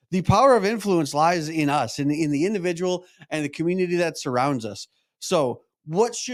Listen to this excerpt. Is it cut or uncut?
uncut